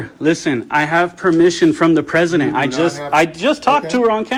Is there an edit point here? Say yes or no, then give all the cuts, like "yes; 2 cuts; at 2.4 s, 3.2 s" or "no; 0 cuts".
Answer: no; 0 cuts